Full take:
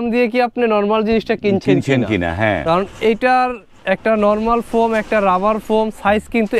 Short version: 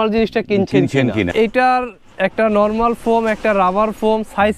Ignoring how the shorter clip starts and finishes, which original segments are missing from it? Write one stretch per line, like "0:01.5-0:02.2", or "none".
0:02.2-0:03.0